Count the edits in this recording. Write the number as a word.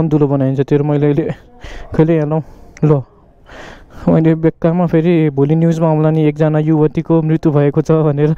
zero